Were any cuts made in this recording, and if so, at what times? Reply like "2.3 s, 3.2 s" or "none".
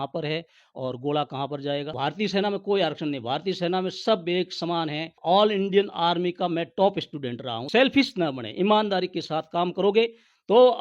1.9 s, 5.2 s, 7.6 s